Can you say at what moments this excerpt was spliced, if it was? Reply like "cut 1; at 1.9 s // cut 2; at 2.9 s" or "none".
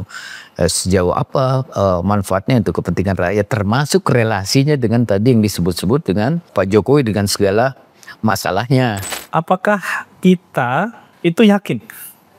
cut 1; at 6.5 s // cut 2; at 9.1 s // cut 3; at 11.0 s